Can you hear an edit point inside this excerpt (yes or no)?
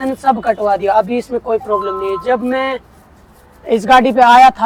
no